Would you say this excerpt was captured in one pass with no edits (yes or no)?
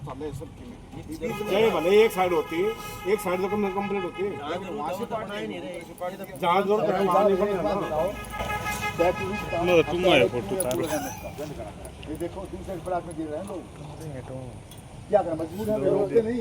yes